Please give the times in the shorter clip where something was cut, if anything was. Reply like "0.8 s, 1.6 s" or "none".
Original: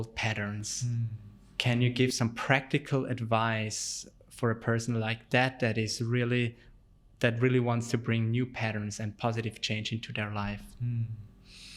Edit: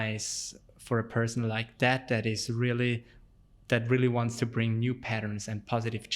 none

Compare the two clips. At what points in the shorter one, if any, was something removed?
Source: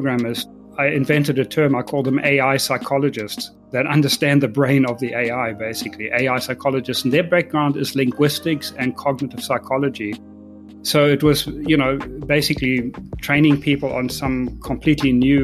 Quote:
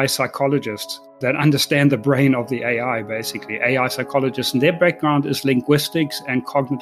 none

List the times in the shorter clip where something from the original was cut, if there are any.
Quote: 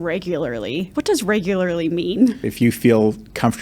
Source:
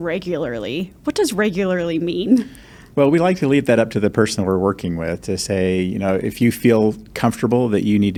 0.9 s, 2.5 s

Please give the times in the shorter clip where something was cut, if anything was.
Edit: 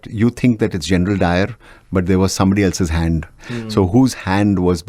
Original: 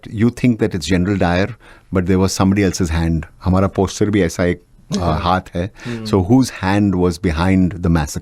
3.3 s

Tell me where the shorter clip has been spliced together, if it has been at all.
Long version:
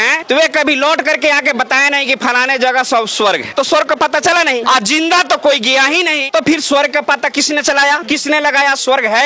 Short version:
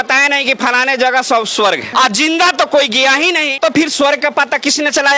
1.9 s

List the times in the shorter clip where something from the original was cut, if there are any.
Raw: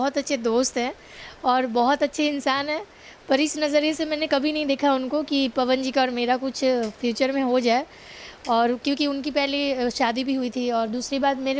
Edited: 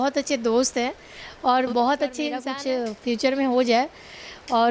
2.5 s

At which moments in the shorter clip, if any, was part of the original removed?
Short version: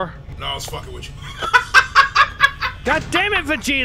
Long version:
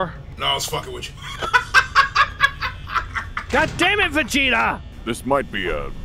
2.7 s

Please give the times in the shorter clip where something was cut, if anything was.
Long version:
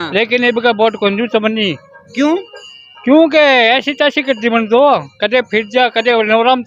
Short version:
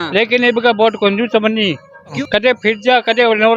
2.2 s

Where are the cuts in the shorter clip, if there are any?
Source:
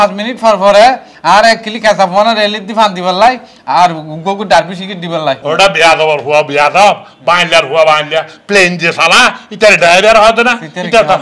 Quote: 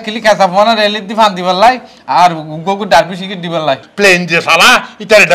3.8 s

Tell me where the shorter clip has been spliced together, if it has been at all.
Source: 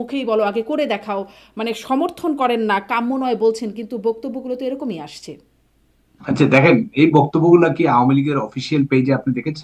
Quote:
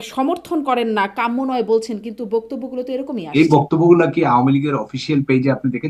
3.3 s

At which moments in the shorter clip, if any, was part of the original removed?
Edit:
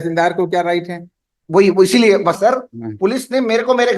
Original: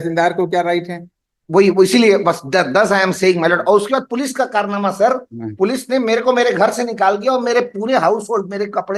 2.4 s

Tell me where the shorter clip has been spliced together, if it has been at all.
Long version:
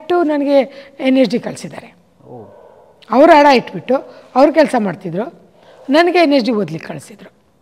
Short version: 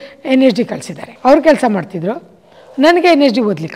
1.1 s

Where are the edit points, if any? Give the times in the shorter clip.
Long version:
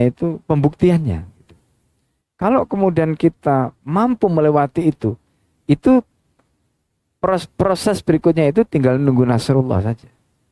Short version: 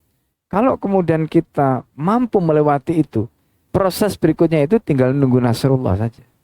3.6 s

